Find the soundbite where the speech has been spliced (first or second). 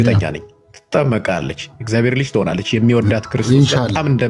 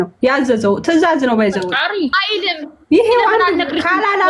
second